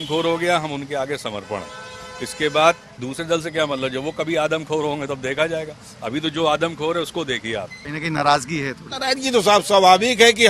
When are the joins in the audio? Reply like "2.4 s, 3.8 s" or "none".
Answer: 7.8 s